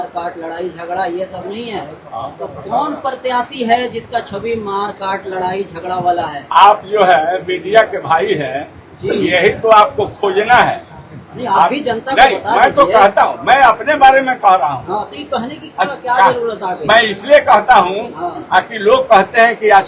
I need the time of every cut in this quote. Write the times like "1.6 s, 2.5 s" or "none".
none